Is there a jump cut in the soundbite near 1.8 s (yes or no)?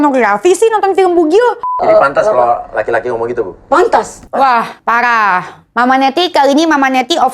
yes